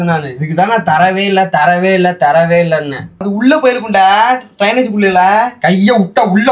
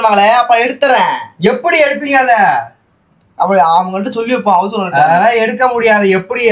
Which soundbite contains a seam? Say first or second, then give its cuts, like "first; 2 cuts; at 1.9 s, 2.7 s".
first; 1 cut; at 3.3 s